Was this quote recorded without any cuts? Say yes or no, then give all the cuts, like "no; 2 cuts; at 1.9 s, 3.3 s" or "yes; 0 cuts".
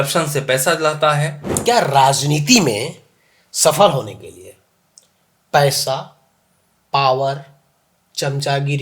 no; 1 cut; at 1.5 s